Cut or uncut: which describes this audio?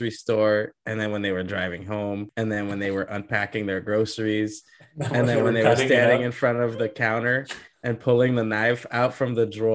cut